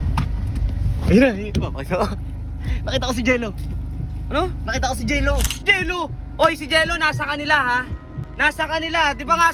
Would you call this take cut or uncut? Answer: cut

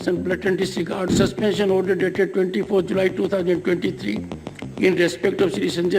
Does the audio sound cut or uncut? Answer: cut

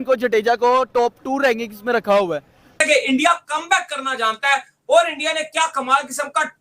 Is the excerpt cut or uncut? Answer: cut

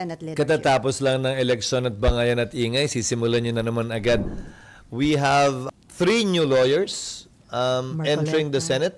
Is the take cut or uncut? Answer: cut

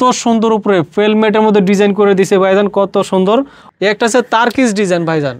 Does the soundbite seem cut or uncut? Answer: cut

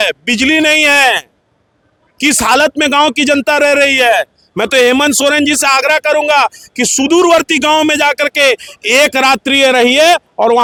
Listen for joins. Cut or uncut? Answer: uncut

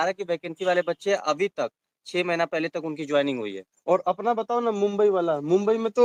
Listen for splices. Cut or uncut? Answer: uncut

